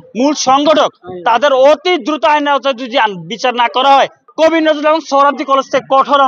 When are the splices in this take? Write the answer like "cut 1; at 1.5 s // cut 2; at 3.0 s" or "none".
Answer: cut 1; at 4.2 s